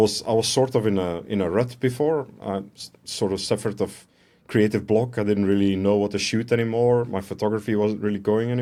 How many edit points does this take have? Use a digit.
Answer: 0